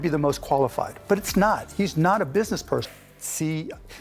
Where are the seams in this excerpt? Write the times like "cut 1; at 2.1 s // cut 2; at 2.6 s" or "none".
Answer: cut 1; at 2.9 s